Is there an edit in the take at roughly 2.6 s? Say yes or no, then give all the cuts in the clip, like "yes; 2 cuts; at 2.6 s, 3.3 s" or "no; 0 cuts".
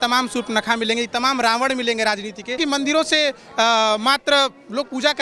yes; 1 cut; at 2.6 s